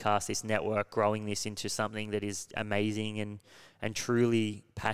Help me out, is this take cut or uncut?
uncut